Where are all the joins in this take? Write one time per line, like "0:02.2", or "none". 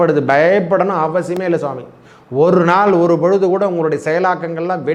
none